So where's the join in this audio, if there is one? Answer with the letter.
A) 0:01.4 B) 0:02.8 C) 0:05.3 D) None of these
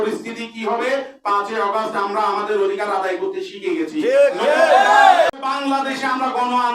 C